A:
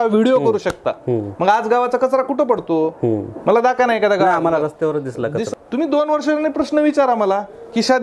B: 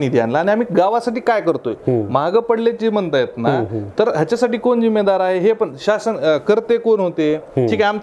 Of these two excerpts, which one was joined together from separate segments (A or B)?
A